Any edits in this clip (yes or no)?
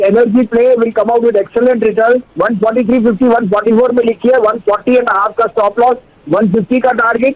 yes